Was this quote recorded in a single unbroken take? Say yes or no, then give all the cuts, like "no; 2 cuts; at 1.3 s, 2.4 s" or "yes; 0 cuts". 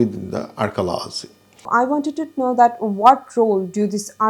no; 1 cut; at 1.7 s